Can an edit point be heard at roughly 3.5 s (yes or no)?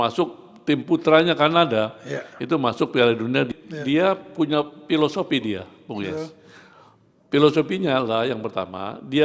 yes